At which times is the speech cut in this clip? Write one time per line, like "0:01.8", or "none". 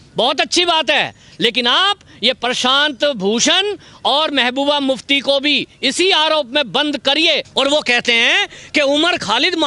0:07.5